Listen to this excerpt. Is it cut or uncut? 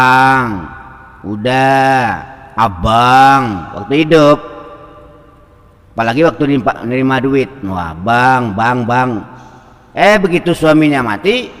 uncut